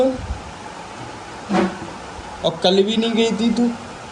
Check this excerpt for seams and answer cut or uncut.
uncut